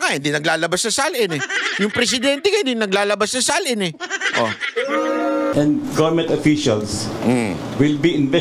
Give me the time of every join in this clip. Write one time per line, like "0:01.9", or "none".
0:05.5